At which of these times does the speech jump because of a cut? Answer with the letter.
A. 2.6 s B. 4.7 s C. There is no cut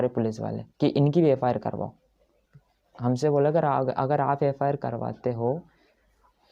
C